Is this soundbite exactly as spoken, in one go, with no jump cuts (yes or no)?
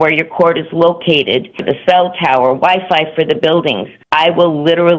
no